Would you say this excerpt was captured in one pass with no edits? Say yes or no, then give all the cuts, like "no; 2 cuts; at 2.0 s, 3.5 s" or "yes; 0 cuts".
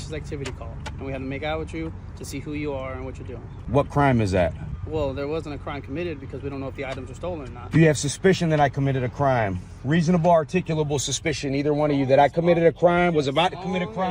no; 2 cuts; at 3.6 s, 4.7 s